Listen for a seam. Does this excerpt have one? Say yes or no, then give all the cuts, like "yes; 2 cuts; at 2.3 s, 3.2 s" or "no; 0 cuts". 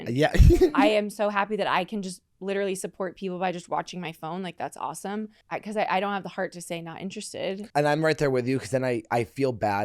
yes; 3 cuts; at 0.8 s, 5.4 s, 7.6 s